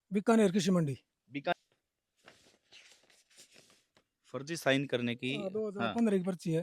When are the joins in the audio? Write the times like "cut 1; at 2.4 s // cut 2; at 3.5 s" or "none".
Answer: cut 1; at 1.5 s

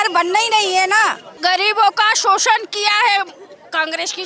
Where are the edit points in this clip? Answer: cut 1; at 1.4 s

